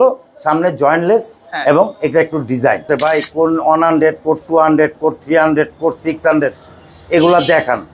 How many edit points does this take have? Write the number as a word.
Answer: one